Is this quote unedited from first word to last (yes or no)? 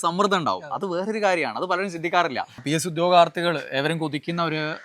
no